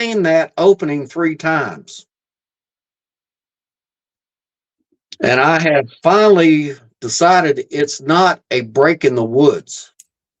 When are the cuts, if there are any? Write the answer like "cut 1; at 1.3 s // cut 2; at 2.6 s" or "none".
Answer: none

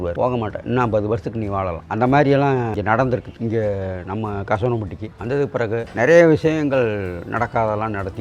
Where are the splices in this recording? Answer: cut 1; at 3.3 s

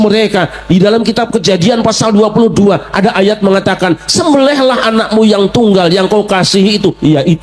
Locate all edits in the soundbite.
none

